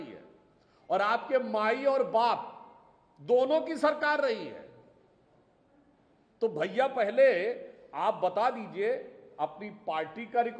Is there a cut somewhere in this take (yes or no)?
no